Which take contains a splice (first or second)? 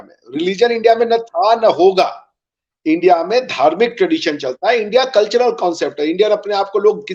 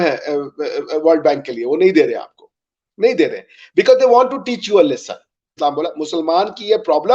second